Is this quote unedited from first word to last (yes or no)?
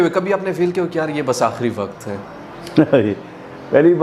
yes